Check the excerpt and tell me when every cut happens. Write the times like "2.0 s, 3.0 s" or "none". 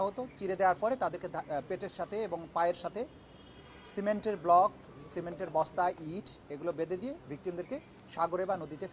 none